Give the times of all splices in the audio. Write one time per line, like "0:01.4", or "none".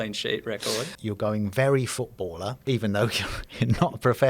0:00.9
0:02.6